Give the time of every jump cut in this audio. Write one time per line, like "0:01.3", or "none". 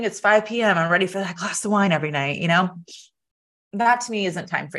none